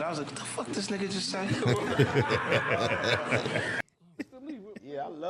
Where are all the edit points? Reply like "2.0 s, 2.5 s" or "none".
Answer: 3.8 s